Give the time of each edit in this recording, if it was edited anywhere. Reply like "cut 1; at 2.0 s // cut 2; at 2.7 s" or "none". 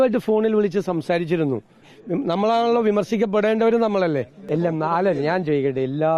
cut 1; at 1.9 s // cut 2; at 4.4 s